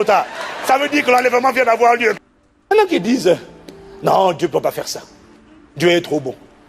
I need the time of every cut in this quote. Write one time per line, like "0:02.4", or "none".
0:02.2